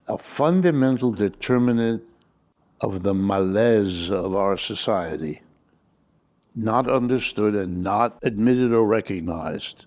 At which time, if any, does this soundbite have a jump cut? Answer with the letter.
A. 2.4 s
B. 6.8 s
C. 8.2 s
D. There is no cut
C